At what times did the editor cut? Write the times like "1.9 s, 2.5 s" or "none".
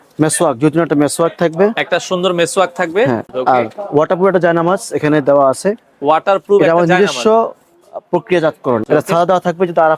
3.3 s, 8.8 s